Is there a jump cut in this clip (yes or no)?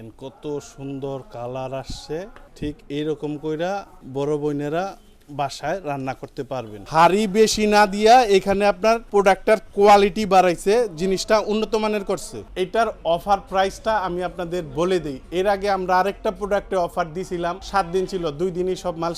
yes